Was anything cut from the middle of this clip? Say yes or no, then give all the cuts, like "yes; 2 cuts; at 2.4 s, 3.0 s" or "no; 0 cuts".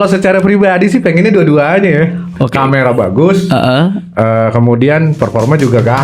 no; 0 cuts